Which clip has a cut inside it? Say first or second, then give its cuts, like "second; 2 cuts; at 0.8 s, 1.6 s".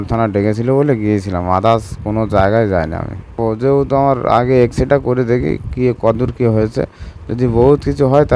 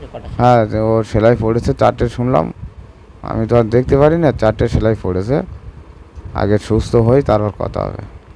first; 1 cut; at 3.4 s